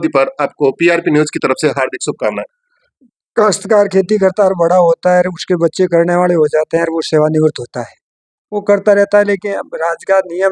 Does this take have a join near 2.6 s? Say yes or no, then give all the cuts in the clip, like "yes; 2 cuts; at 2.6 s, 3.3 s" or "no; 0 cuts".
yes; 1 cut; at 2.6 s